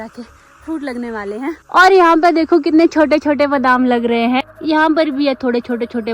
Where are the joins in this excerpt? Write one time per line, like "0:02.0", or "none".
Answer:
0:01.6
0:04.5